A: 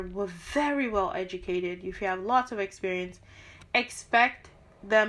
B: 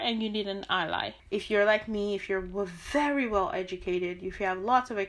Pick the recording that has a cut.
B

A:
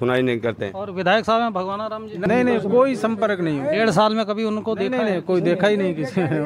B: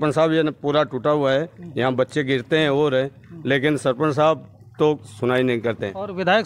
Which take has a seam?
A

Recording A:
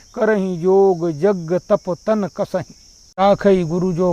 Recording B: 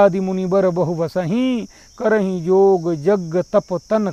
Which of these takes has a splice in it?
A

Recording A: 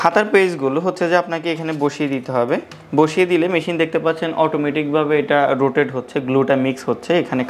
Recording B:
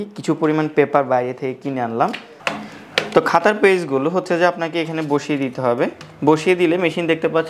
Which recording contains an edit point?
B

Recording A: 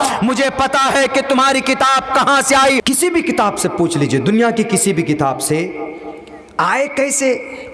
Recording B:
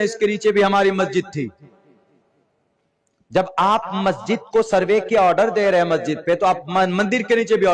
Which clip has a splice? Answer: A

